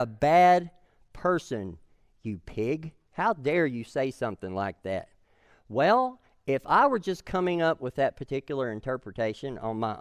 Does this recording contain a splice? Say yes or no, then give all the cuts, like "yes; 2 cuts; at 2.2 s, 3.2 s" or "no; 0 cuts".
no; 0 cuts